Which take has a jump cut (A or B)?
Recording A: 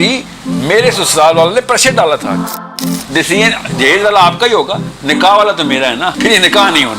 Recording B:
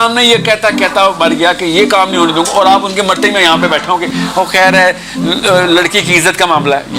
A